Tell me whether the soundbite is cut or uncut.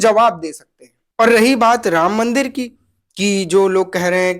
uncut